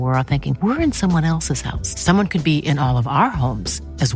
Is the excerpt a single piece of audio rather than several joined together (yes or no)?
yes